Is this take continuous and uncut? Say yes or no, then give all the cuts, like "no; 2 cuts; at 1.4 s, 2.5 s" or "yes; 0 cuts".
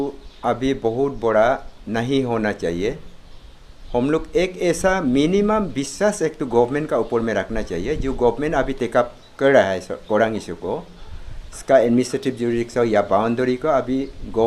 yes; 0 cuts